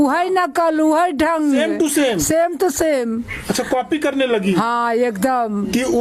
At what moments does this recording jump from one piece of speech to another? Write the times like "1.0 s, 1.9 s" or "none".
none